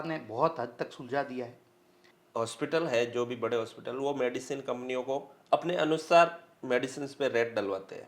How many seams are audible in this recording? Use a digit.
1